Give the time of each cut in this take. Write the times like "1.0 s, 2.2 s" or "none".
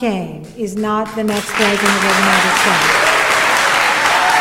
none